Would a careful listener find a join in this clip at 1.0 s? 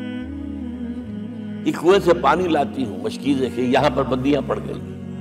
yes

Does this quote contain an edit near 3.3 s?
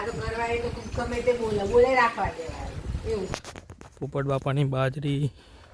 yes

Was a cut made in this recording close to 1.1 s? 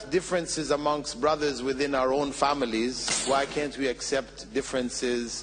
no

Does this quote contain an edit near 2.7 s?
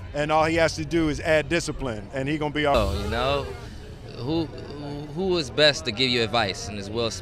yes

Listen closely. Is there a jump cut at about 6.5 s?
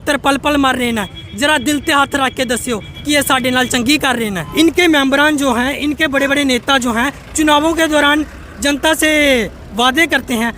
no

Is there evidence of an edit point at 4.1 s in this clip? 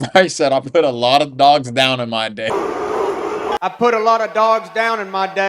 no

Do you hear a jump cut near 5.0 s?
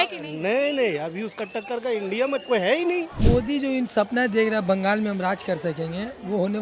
no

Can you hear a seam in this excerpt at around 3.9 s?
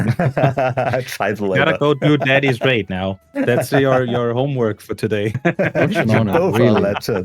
no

